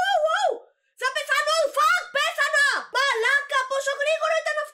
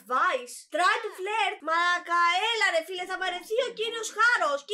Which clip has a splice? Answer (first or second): second